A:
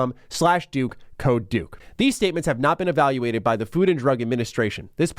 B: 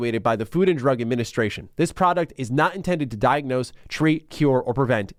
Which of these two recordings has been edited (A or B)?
A